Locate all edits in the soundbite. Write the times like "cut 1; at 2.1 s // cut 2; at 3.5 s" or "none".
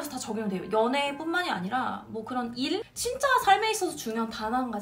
cut 1; at 2.9 s